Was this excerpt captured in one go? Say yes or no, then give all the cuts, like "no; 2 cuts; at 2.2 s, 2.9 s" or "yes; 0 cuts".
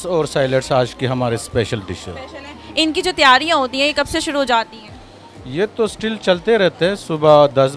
yes; 0 cuts